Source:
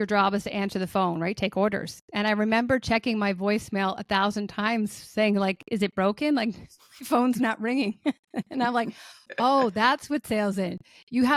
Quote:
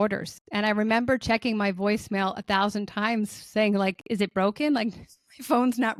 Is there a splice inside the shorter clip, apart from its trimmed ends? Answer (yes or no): no